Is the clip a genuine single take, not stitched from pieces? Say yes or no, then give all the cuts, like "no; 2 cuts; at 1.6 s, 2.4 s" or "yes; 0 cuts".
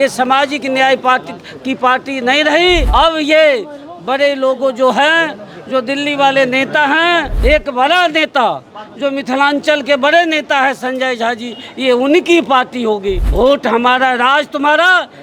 no; 3 cuts; at 2.9 s, 7.3 s, 13.2 s